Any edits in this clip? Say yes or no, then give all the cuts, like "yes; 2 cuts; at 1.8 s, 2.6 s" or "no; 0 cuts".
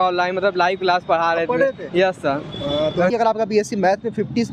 yes; 1 cut; at 3.1 s